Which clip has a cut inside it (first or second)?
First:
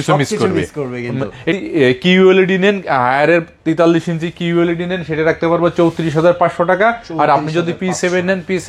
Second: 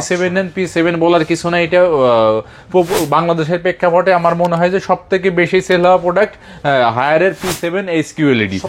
first